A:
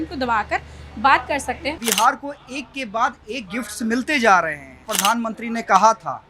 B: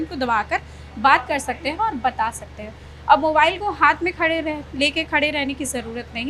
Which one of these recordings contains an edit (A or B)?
A